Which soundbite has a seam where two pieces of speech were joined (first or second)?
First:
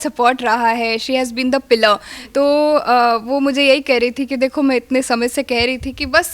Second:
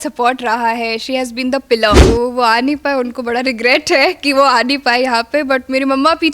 second